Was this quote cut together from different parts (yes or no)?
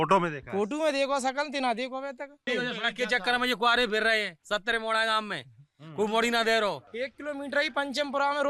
yes